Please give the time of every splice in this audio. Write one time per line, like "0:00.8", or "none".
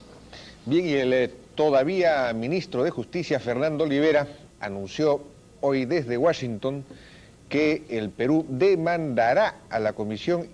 0:01.6